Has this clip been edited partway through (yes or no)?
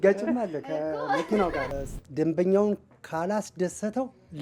yes